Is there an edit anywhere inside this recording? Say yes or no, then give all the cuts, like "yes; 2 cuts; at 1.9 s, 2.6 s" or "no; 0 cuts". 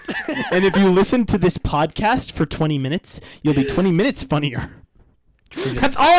no; 0 cuts